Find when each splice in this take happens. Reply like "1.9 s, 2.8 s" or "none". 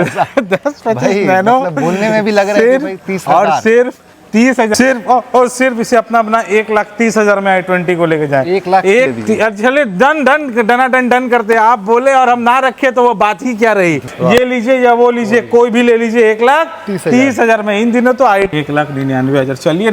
4.7 s, 9.1 s, 14.0 s, 18.5 s

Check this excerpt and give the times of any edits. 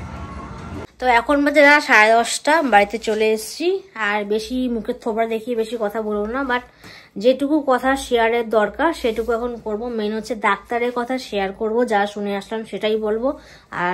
none

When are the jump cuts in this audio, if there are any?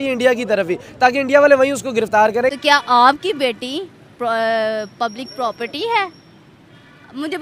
2.5 s

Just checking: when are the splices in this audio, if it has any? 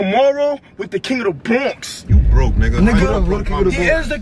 none

